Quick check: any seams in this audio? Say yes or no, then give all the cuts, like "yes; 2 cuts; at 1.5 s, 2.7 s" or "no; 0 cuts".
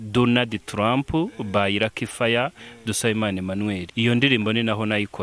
yes; 1 cut; at 3.9 s